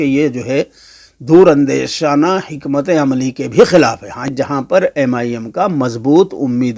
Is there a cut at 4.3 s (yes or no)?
yes